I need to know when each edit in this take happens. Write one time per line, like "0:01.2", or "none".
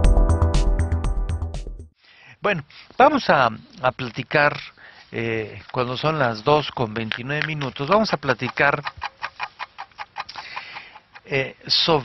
none